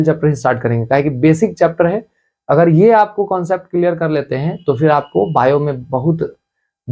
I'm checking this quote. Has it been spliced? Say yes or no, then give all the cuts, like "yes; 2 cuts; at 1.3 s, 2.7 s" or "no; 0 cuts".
no; 0 cuts